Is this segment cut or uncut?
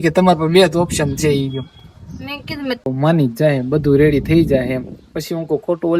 cut